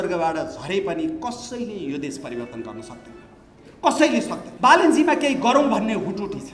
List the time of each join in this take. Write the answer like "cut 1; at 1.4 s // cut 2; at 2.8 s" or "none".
cut 1; at 4.4 s